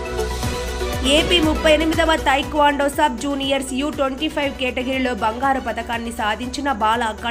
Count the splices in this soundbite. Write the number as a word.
zero